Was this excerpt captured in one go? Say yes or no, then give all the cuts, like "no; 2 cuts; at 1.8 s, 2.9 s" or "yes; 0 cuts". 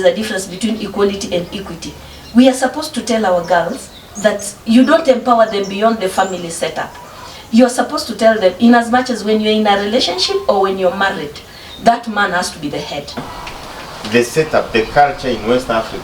no; 1 cut; at 13.3 s